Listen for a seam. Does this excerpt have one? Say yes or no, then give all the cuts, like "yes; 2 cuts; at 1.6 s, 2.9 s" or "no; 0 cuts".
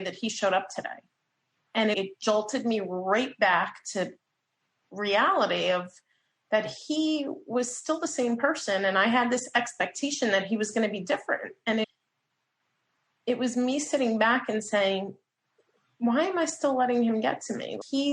yes; 1 cut; at 4.9 s